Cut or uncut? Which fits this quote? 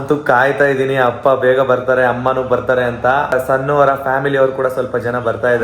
cut